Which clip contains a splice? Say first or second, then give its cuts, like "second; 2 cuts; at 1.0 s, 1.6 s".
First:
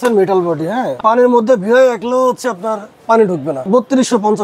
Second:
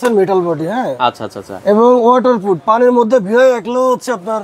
first; 2 cuts; at 1.0 s, 3.7 s